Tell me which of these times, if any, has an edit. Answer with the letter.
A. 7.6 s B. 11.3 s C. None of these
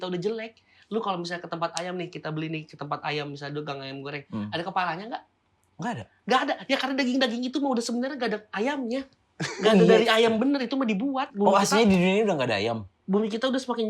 B